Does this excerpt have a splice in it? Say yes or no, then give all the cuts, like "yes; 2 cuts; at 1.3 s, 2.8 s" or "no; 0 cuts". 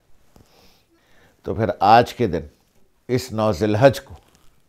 yes; 1 cut; at 1.0 s